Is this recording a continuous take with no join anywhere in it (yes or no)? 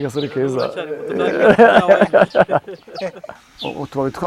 no